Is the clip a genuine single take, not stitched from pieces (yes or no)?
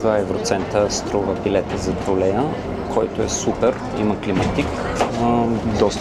yes